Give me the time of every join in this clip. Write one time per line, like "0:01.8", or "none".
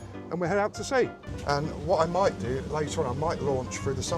0:01.3